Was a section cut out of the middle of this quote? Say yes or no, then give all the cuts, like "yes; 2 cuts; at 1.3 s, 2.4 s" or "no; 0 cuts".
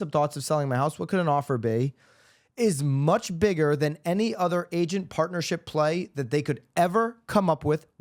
no; 0 cuts